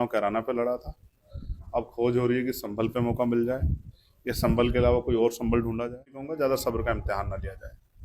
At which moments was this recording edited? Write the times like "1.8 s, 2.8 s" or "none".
6.2 s

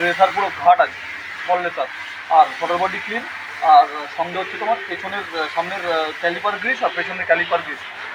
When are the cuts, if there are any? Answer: none

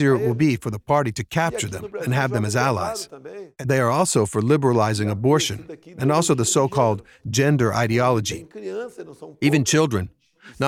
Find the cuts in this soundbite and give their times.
3.5 s

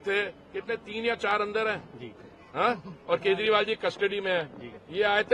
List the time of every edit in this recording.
none

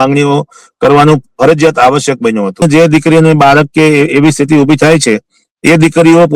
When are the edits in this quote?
2.6 s

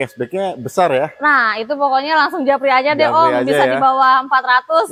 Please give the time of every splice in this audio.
none

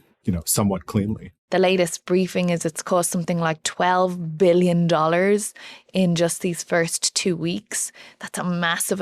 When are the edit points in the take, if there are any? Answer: 1.3 s

